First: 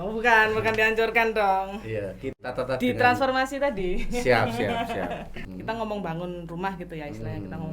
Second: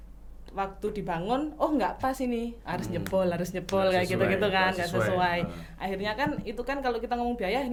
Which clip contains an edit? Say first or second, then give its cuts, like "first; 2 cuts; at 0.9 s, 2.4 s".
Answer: first; 1 cut; at 5.5 s